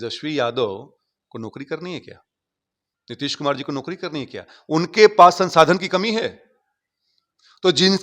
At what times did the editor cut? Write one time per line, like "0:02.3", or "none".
none